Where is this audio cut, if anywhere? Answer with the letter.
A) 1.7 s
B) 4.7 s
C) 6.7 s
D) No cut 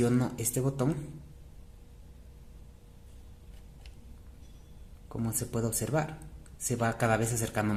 D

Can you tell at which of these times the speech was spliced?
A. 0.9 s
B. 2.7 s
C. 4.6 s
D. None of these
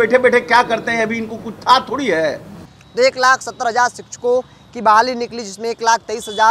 D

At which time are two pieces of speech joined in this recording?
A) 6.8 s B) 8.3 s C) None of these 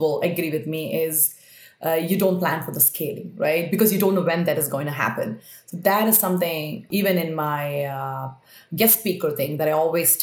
A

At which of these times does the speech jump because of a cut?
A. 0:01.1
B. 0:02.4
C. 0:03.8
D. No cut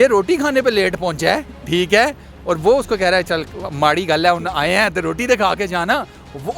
D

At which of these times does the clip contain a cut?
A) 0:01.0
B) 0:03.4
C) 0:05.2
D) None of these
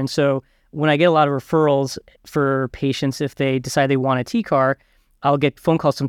C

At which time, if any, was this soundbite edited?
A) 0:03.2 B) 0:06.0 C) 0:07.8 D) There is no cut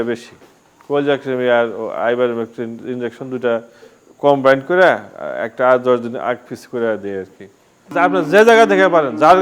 C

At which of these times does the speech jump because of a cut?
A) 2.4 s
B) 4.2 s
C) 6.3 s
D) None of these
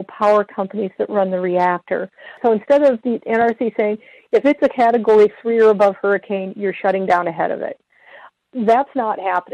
A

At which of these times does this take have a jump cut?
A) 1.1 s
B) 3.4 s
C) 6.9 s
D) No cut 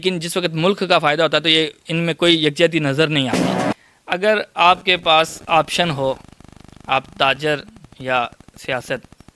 B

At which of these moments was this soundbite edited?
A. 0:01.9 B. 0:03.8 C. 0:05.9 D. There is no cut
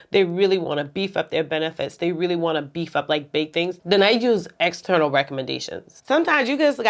C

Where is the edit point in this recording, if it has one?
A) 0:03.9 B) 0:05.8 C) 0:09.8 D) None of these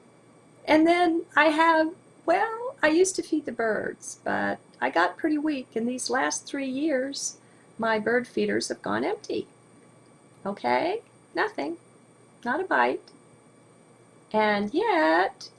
A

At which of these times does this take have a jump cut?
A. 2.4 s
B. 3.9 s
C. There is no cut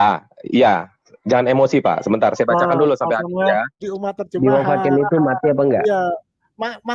B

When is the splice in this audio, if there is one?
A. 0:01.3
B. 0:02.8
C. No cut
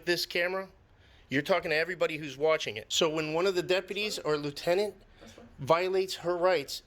B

